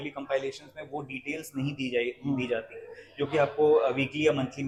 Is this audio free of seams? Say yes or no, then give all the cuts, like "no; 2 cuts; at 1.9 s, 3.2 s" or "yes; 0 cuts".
yes; 0 cuts